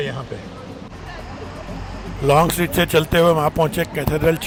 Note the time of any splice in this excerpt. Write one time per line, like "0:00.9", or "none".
none